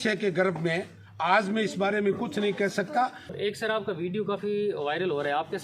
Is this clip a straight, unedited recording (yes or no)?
no